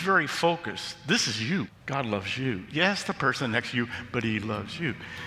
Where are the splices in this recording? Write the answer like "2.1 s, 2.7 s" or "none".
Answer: 1.8 s